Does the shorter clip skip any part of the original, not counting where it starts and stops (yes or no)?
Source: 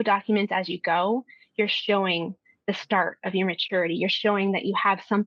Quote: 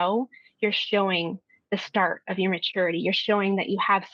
no